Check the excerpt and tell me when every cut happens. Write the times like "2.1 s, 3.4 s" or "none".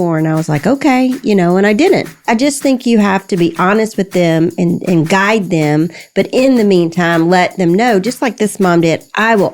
2.2 s

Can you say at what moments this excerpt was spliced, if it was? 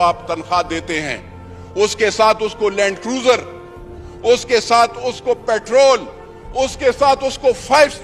none

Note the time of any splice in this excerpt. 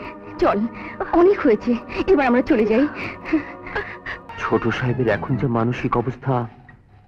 4.3 s

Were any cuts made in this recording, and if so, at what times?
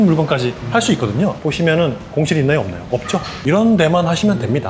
1.4 s, 3.3 s

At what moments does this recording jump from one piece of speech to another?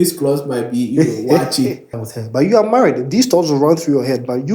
2.0 s

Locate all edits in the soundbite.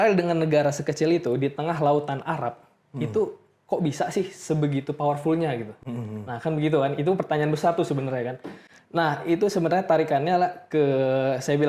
none

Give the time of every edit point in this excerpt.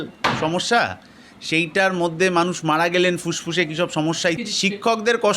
4.4 s

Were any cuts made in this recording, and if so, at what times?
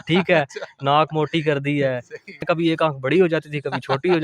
2.4 s

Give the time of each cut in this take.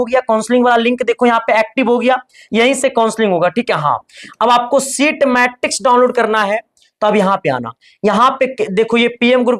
none

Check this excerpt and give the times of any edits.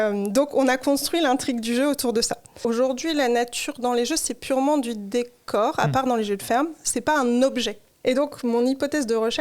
2.4 s, 7.8 s

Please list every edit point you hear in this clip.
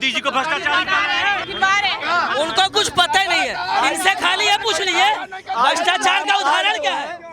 1.5 s

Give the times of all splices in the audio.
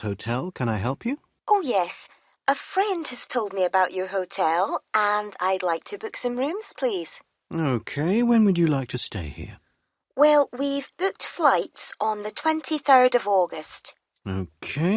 1.3 s

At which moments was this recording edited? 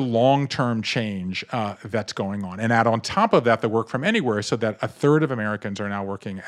none

